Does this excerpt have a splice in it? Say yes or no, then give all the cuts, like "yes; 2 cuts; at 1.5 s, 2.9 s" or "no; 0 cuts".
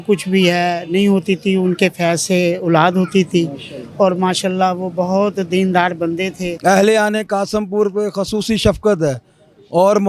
yes; 1 cut; at 6.4 s